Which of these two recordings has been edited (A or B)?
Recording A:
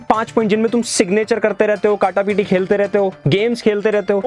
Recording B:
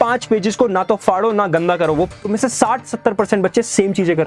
B